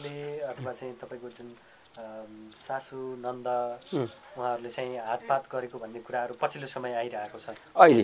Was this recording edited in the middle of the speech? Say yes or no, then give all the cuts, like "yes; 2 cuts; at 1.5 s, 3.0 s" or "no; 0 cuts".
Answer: no; 0 cuts